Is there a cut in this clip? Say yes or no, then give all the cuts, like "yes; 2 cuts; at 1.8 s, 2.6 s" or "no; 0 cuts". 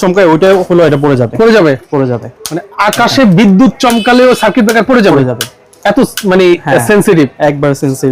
no; 0 cuts